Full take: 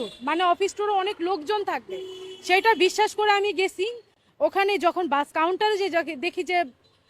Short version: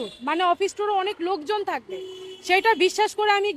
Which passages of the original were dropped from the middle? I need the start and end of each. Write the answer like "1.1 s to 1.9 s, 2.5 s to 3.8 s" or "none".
none